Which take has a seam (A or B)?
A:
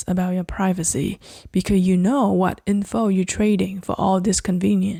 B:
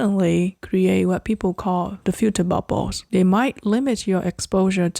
B